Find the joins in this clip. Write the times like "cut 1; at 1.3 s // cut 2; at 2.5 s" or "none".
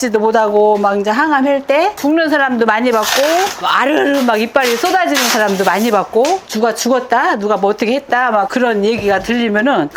cut 1; at 1.9 s // cut 2; at 6.4 s